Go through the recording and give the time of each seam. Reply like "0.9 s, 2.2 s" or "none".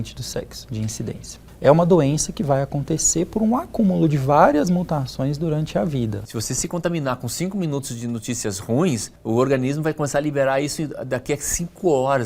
1.3 s, 6.3 s, 9.1 s